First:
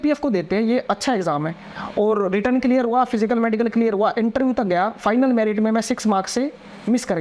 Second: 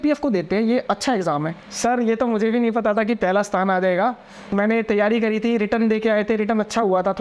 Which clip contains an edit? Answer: second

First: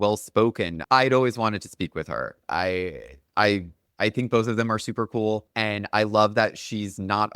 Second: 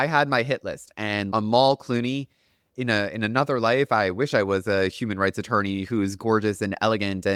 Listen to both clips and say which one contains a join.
first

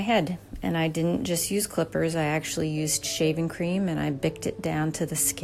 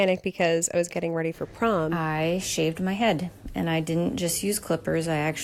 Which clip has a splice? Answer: second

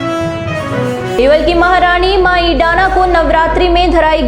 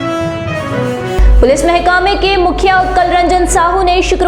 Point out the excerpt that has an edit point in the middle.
first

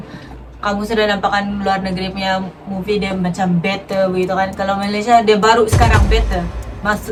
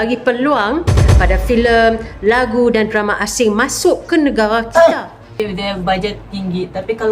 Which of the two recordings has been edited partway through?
second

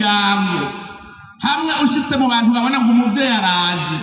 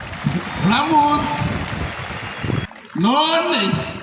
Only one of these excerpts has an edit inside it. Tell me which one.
second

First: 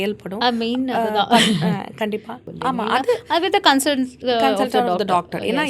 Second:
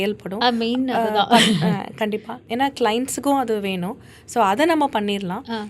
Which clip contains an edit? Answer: first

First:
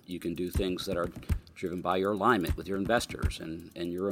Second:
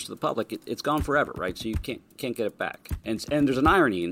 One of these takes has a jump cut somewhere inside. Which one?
second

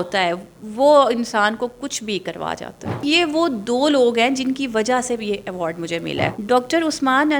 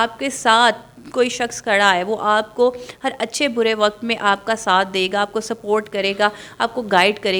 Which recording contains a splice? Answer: first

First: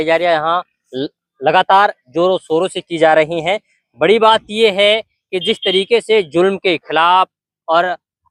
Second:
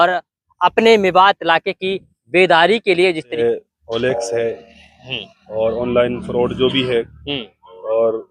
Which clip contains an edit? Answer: second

